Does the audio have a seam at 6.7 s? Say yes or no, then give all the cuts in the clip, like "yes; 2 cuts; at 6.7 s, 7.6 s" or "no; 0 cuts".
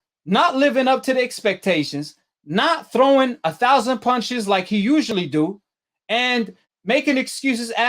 yes; 1 cut; at 6.7 s